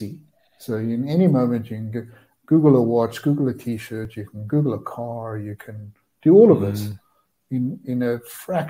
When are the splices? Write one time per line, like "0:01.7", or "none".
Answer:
none